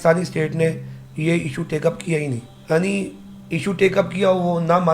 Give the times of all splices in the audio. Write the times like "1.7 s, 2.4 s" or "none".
2.5 s